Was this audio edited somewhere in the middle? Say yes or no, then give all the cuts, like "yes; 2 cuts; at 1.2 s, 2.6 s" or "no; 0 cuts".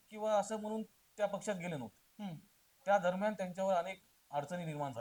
no; 0 cuts